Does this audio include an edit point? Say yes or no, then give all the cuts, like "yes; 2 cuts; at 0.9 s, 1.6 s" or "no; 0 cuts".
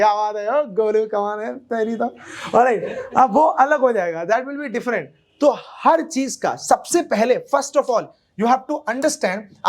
no; 0 cuts